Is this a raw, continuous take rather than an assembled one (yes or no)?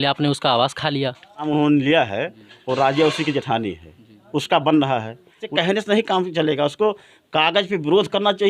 no